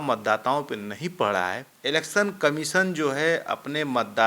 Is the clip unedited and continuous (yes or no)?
no